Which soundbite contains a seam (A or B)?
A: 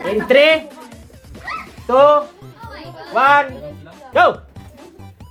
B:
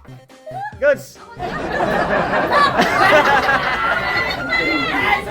B